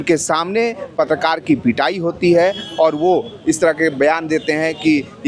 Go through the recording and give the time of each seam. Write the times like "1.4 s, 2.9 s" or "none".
none